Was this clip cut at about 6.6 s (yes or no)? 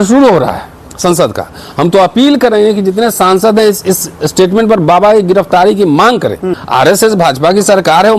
yes